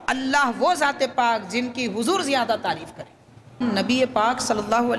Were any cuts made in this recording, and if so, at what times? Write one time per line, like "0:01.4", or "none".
0:03.6